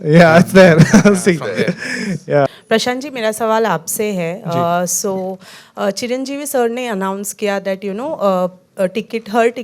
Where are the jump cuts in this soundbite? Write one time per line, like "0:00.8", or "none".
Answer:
0:02.5